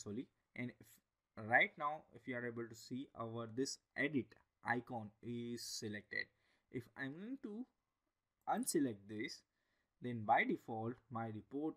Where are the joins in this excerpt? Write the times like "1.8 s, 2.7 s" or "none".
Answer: none

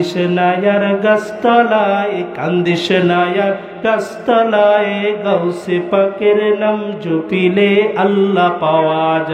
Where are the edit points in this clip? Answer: none

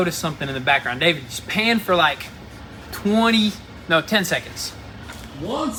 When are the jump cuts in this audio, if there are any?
none

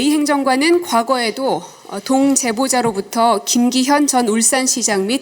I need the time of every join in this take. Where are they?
none

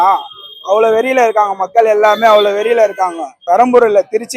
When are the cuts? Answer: 3.3 s

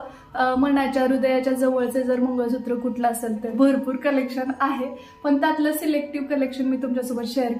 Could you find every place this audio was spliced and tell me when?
3.5 s

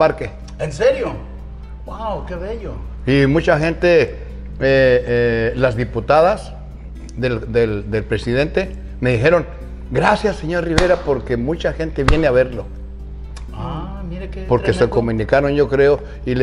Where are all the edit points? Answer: none

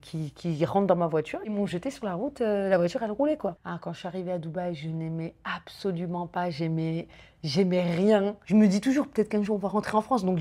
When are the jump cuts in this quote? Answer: 1.4 s, 3.6 s, 8.4 s

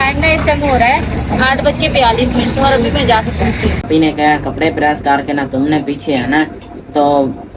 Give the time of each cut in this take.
3.8 s

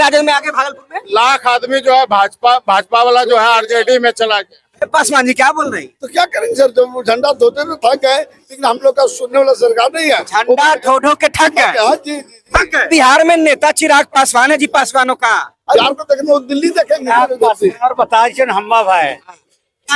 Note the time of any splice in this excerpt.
12.9 s, 15.8 s, 17.1 s

